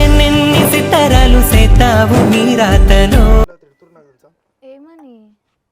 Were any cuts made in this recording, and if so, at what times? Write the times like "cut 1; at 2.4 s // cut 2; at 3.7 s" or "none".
cut 1; at 3.5 s